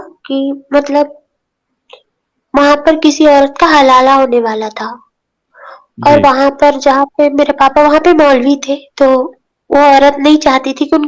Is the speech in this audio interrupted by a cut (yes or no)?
no